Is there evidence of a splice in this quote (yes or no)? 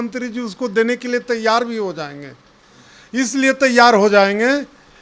no